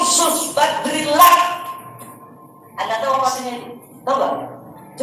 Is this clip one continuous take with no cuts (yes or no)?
yes